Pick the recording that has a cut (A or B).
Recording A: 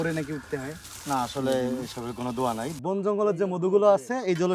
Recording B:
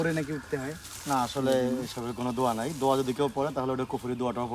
A